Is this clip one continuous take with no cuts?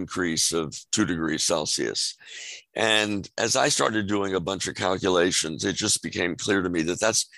yes; 0 cuts

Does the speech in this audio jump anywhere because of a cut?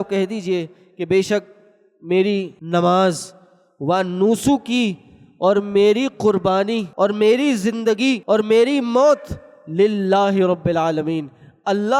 yes; 3 cuts; at 2.6 s, 6.9 s, 8.2 s

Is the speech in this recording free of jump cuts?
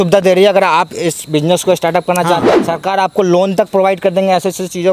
no; 1 cut; at 2.5 s

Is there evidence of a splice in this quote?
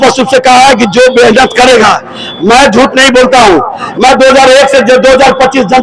no; 0 cuts

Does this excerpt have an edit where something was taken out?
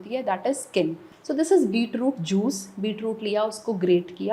yes; 1 cut; at 1.1 s

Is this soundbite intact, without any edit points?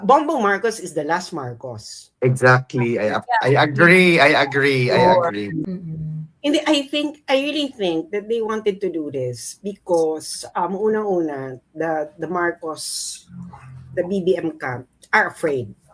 no; 1 cut; at 5.6 s

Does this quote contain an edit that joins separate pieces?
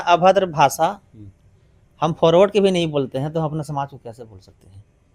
no; 0 cuts

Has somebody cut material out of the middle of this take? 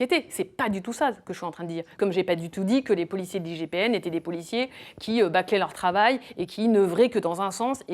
yes; 1 cut; at 1.8 s

